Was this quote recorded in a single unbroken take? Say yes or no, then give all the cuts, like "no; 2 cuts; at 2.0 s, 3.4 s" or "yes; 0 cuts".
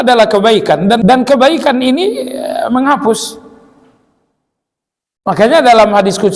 no; 1 cut; at 1.0 s